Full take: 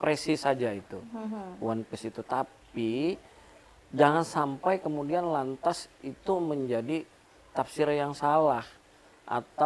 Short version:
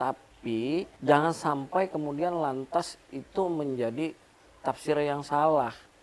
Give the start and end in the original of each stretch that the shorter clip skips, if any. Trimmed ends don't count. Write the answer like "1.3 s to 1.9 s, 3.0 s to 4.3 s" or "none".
3.2 s to 3.8 s